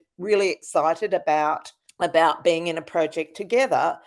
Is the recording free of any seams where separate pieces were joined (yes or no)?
yes